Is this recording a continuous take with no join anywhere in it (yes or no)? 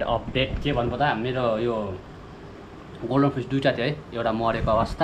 yes